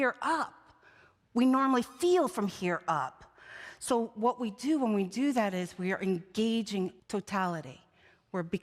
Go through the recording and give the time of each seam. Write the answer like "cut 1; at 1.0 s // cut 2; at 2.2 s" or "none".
cut 1; at 7.0 s